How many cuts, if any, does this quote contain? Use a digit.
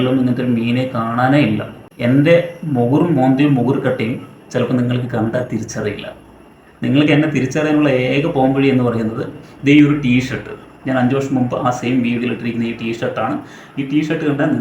1